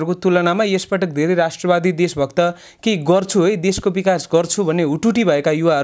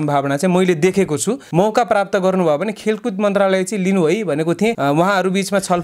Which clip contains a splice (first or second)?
second